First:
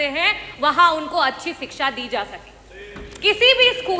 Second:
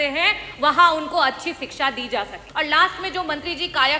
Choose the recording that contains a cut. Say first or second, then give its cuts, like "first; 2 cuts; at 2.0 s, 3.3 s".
second; 1 cut; at 2.4 s